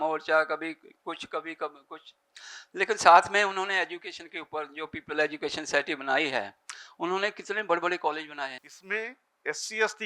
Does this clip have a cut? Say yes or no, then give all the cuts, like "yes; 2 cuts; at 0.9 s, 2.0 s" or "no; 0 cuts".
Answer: yes; 1 cut; at 8.6 s